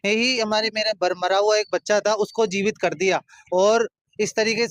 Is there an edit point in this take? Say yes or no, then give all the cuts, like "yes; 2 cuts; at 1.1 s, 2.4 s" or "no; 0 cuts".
no; 0 cuts